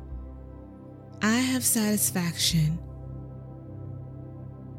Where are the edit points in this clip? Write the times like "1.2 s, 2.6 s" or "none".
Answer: 1.2 s, 3.1 s